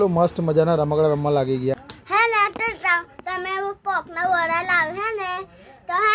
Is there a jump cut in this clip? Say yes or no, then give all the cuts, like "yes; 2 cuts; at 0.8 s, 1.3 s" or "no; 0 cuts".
yes; 1 cut; at 1.9 s